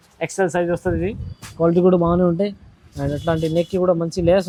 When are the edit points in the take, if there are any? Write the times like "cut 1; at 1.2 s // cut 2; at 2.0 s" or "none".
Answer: none

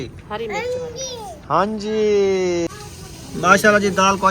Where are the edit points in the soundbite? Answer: cut 1; at 2.7 s

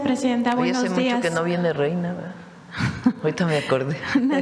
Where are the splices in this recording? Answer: none

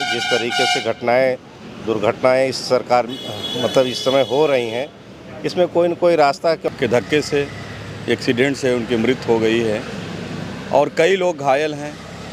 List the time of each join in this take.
cut 1; at 6.6 s

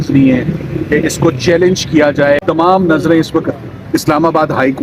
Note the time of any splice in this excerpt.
cut 1; at 2.4 s

